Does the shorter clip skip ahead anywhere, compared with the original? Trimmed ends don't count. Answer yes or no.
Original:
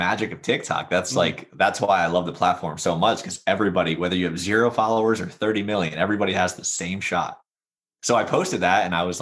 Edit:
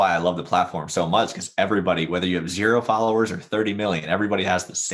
no